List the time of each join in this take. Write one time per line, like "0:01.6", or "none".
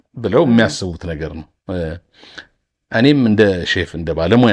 none